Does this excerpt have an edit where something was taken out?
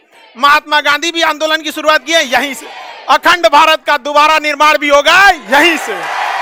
no; 0 cuts

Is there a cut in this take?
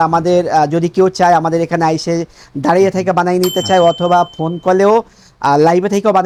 no; 0 cuts

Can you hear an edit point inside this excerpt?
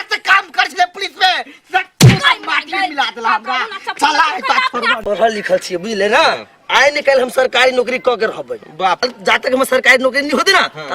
yes; 2 cuts; at 5.0 s, 9.0 s

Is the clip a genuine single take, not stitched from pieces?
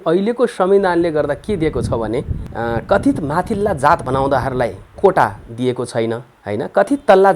no; 2 cuts; at 2.4 s, 6.3 s

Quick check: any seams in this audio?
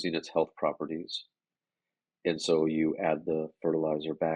no; 0 cuts

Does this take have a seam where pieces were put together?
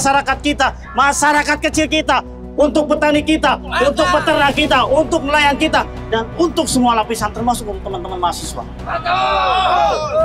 no; 0 cuts

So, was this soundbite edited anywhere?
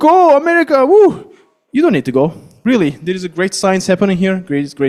no; 0 cuts

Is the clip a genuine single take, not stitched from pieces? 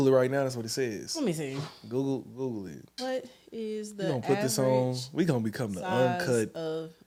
yes; 0 cuts

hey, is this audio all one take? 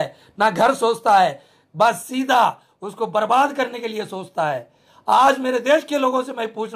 yes; 0 cuts

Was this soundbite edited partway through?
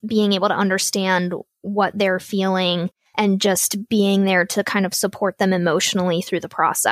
yes; 1 cut; at 3.0 s

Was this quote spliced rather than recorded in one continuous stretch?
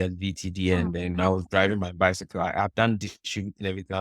no; 0 cuts

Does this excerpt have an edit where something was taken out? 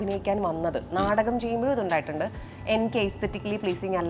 no; 0 cuts

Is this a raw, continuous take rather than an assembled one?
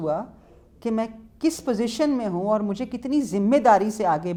yes; 0 cuts

